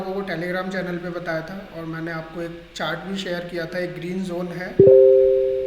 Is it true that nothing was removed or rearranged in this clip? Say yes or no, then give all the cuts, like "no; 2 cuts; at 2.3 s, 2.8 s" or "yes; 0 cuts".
yes; 0 cuts